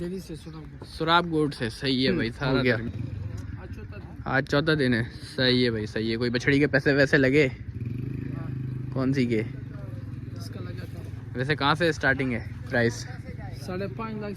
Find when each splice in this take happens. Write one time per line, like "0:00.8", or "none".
0:02.3